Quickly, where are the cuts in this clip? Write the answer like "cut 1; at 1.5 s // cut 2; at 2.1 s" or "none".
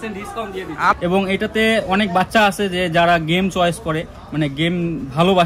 cut 1; at 0.9 s